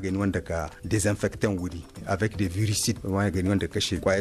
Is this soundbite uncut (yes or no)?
yes